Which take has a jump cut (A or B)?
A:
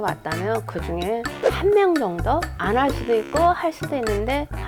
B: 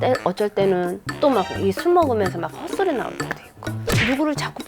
B